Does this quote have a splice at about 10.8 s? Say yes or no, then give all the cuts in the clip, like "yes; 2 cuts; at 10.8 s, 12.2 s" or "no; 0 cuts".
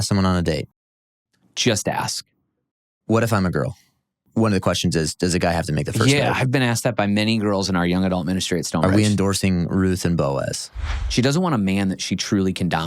yes; 2 cuts; at 4.2 s, 10.8 s